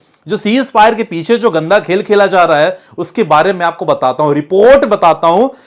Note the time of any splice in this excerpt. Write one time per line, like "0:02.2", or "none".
none